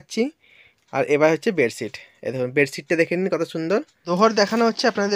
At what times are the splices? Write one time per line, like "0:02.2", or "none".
0:03.9